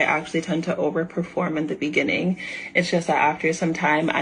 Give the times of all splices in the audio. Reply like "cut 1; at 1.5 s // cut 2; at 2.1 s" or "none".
none